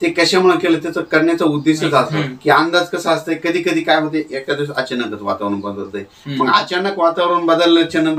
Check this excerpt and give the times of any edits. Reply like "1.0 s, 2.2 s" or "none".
2.2 s